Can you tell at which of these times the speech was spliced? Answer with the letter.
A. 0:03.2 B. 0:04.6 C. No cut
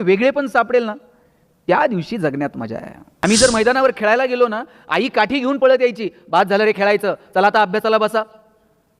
A